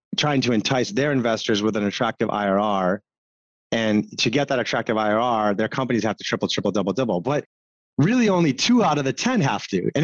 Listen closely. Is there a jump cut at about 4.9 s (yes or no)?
no